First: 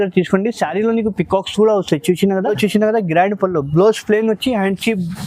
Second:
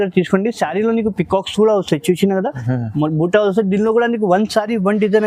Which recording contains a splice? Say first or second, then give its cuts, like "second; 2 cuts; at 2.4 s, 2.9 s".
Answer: first; 1 cut; at 2.5 s